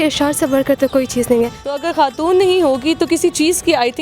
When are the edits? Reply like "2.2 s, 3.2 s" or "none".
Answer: 1.8 s